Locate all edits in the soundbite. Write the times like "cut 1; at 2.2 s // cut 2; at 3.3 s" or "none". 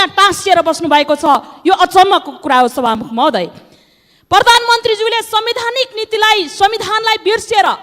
none